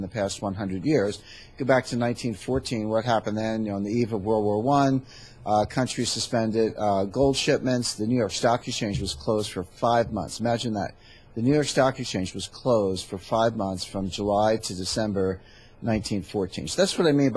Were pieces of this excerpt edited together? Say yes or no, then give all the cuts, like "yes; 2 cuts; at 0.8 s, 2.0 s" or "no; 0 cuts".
no; 0 cuts